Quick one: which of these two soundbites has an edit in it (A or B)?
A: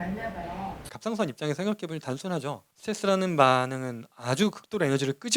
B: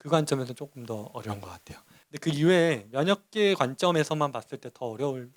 A